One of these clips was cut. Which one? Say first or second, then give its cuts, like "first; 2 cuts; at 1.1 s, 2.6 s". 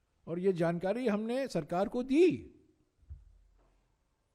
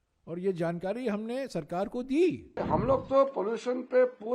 second; 1 cut; at 2.5 s